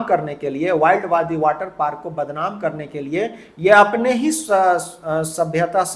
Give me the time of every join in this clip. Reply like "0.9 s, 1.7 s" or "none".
none